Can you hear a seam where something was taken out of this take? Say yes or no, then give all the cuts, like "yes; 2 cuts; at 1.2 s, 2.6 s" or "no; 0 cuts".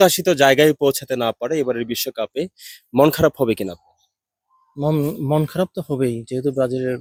no; 0 cuts